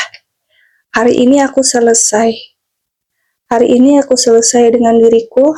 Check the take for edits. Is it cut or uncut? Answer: uncut